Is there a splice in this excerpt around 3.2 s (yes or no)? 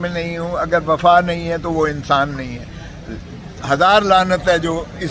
no